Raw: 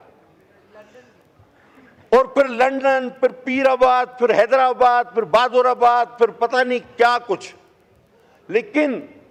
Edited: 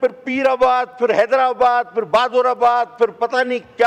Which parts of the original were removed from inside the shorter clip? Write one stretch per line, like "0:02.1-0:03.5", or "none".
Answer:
none